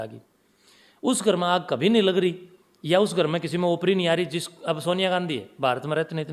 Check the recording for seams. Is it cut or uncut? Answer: uncut